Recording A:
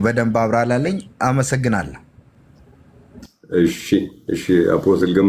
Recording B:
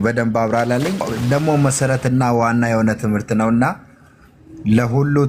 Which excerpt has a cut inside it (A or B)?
B